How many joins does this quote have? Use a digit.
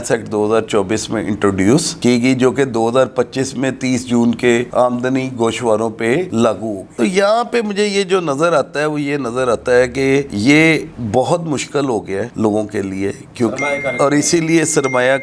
0